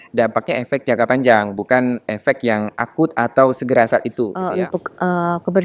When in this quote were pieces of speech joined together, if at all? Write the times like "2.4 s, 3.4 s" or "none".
4.4 s